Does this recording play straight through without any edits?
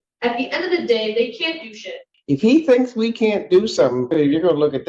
no; 2 cuts; at 2.1 s, 4.1 s

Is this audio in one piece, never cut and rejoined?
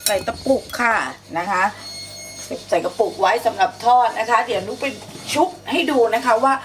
yes; 0 cuts

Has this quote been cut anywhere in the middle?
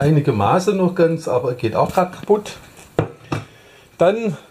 yes; 1 cut; at 2.9 s

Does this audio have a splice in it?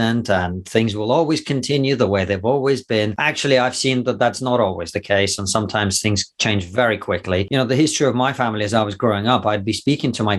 yes; 2 cuts; at 3.2 s, 7.5 s

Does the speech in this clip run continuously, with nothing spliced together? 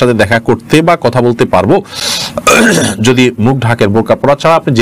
yes; 0 cuts

